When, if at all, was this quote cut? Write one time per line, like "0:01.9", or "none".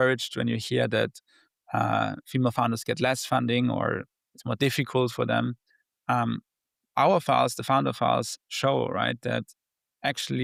none